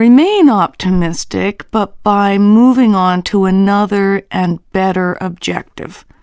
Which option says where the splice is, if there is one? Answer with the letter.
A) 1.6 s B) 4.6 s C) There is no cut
A